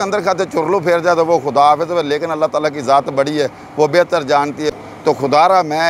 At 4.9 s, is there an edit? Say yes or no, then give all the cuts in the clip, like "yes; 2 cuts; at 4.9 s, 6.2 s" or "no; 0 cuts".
yes; 1 cut; at 4.9 s